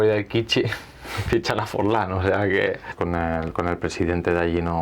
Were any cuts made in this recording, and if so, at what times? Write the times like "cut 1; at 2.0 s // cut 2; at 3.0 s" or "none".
cut 1; at 2.9 s